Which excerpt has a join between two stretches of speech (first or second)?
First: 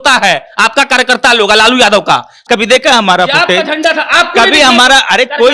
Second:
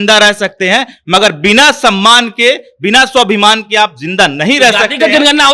first